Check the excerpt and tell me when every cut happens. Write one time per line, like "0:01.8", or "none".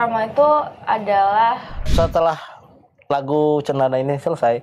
0:01.7